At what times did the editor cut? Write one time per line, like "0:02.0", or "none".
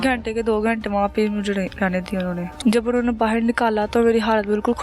0:02.5